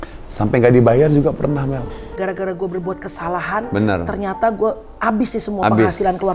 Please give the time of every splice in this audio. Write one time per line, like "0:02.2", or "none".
0:02.0